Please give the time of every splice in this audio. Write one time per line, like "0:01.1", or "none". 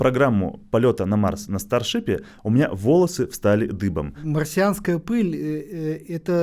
0:04.2